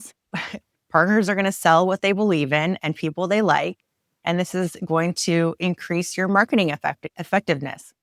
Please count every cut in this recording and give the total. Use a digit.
1